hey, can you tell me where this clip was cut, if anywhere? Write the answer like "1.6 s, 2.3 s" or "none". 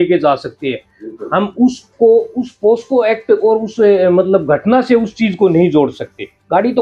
none